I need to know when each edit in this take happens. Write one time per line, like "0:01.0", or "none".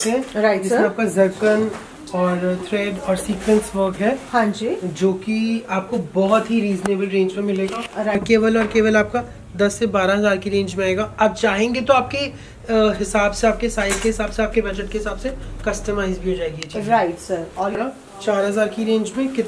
0:08.2
0:17.7